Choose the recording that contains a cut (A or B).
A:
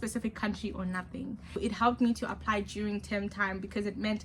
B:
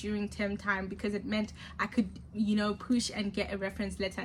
A